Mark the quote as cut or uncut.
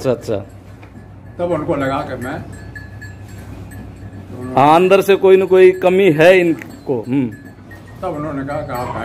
uncut